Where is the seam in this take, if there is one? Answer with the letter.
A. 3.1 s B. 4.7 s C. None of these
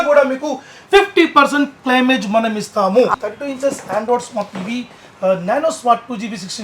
A